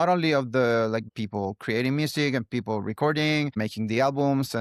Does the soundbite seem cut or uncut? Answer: cut